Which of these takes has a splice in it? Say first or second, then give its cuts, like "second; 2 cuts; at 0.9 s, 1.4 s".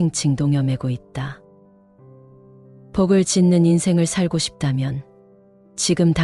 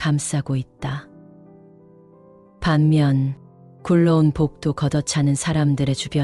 second; 2 cuts; at 1.0 s, 2.6 s